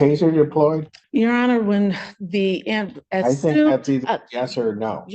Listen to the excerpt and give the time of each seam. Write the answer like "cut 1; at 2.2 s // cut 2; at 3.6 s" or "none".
cut 1; at 0.9 s

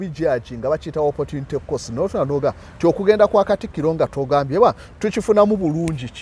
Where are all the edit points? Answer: none

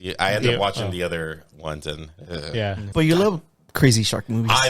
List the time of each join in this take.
cut 1; at 2.8 s

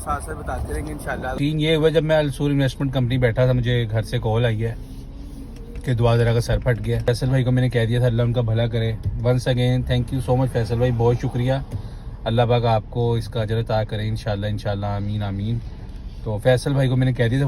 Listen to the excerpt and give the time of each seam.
cut 1; at 1.4 s // cut 2; at 7.1 s

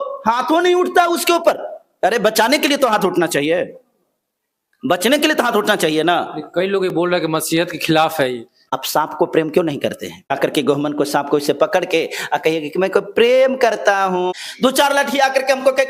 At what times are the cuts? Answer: cut 1; at 8.8 s // cut 2; at 10.3 s // cut 3; at 14.3 s

